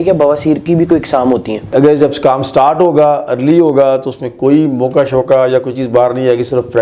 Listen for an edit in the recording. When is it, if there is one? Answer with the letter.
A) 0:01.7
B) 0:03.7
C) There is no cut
A